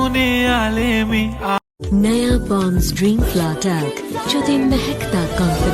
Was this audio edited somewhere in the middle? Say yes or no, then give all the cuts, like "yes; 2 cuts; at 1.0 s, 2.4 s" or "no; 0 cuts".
yes; 1 cut; at 1.6 s